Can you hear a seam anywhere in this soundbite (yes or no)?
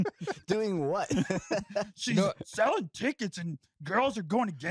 no